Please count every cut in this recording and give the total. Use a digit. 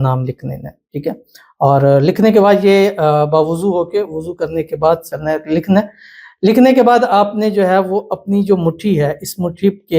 1